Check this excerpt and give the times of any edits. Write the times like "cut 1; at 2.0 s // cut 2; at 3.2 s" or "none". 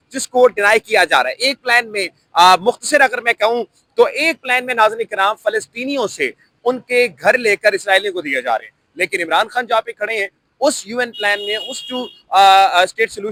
none